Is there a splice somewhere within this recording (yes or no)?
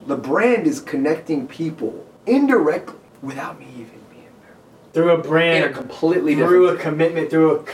yes